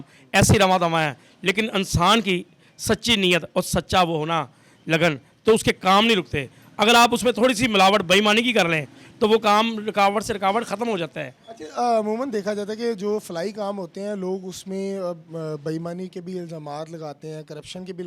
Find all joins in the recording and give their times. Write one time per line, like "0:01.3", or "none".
none